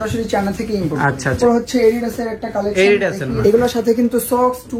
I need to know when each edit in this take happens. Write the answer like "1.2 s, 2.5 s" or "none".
1.4 s, 3.3 s